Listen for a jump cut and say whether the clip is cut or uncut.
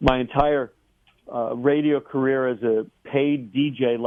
uncut